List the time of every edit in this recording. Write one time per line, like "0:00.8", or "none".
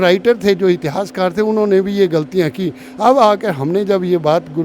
none